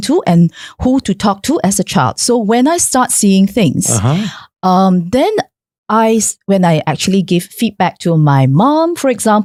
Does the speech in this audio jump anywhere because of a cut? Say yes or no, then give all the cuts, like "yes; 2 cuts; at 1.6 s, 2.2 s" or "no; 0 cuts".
no; 0 cuts